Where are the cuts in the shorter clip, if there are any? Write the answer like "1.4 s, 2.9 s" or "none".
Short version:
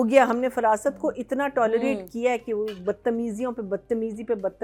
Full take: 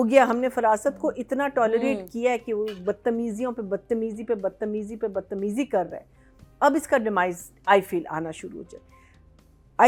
none